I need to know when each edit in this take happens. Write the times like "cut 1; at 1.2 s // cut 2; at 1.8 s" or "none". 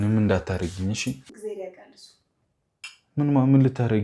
cut 1; at 1.3 s